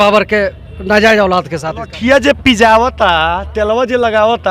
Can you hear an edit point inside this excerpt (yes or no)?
yes